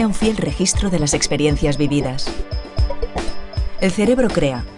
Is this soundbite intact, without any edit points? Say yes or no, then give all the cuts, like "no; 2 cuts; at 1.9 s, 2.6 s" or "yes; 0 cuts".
yes; 0 cuts